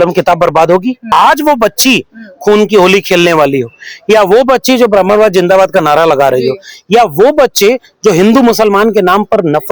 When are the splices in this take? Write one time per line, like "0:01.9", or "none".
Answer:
0:01.1

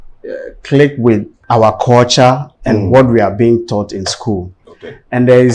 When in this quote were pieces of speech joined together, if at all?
0:01.3

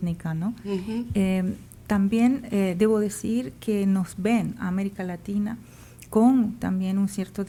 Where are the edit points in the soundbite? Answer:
none

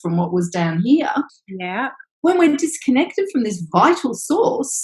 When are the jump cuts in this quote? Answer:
0:01.4

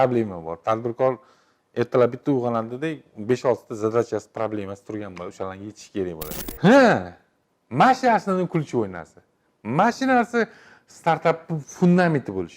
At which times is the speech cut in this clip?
0:06.4

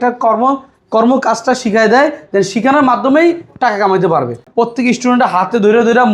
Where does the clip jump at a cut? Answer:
0:04.4

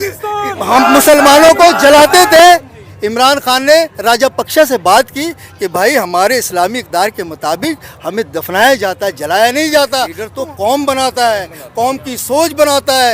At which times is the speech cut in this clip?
0:10.2

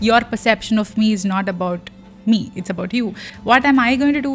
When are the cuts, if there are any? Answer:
0:03.2

